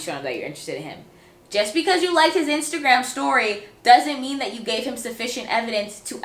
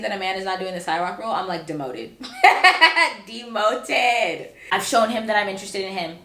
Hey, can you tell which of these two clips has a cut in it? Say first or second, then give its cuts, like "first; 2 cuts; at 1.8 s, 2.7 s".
second; 1 cut; at 4.5 s